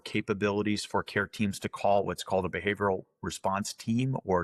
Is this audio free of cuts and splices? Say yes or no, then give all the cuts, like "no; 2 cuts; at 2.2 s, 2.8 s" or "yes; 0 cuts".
yes; 0 cuts